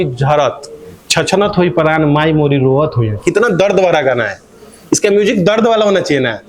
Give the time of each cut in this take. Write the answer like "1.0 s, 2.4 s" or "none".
none